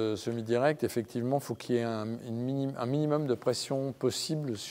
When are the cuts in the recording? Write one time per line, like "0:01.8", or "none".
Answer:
none